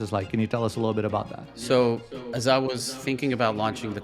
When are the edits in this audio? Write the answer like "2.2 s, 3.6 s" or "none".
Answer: 1.5 s